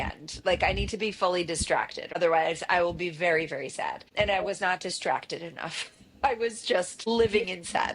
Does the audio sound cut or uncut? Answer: cut